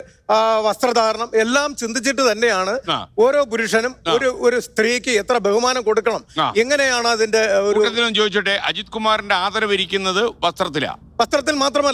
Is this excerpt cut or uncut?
uncut